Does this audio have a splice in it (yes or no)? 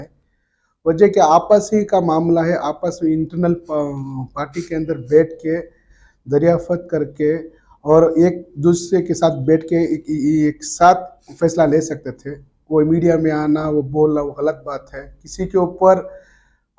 no